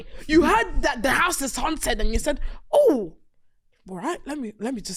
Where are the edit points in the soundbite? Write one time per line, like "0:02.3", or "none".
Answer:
none